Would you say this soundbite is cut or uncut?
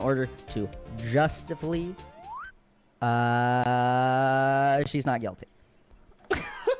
uncut